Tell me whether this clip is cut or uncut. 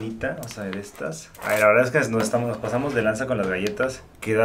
cut